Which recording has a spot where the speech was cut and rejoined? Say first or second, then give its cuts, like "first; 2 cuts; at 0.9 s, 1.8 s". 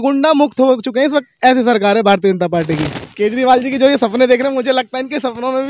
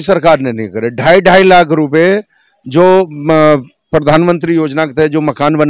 first; 1 cut; at 3.0 s